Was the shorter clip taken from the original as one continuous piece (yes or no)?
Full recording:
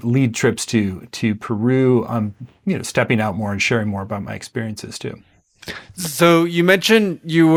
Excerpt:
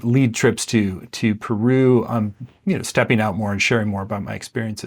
yes